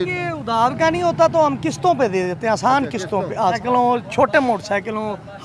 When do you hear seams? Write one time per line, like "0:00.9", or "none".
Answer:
0:03.6